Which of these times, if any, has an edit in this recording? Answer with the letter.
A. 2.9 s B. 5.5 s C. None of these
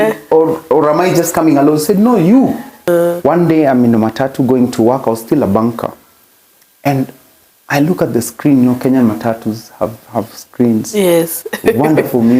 A